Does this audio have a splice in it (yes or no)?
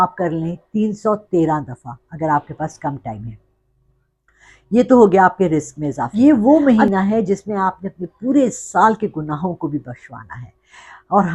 yes